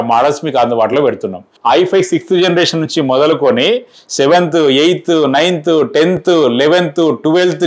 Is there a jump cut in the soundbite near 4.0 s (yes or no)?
no